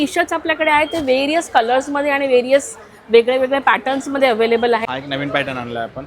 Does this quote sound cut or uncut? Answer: cut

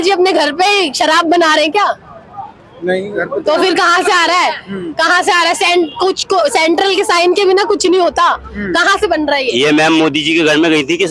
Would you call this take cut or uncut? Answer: uncut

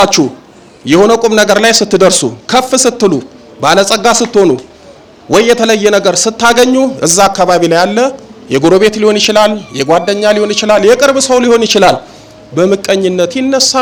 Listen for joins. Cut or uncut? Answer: uncut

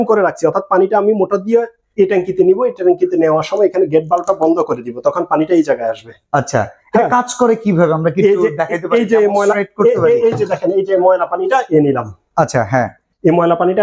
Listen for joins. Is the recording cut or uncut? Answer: uncut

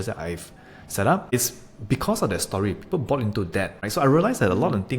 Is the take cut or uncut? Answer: cut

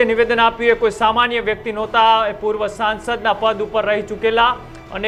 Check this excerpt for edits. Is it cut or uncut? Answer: uncut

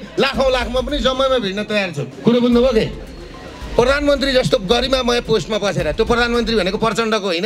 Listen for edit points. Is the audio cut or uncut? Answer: cut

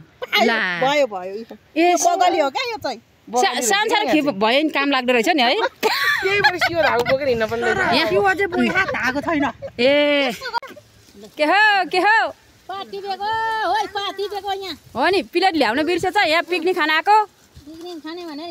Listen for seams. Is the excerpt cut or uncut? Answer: cut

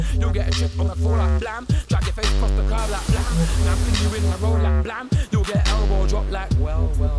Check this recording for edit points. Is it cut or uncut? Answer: uncut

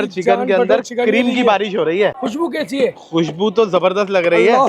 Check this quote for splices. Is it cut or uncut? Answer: cut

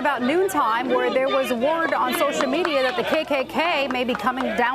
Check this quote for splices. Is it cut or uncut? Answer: uncut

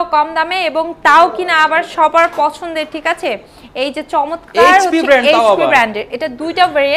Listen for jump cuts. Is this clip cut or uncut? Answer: uncut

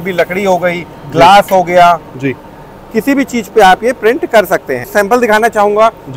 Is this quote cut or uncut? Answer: uncut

